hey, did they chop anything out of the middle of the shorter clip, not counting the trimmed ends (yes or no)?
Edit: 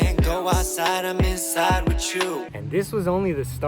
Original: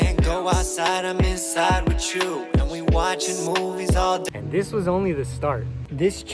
yes